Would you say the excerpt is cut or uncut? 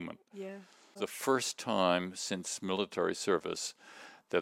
cut